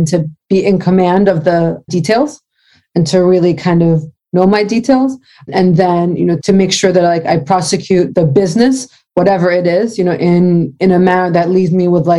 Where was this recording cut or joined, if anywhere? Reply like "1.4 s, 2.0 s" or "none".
1.9 s, 5.5 s, 6.4 s, 8.1 s